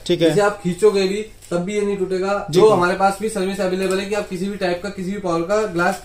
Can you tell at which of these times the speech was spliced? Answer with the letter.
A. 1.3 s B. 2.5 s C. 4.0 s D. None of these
B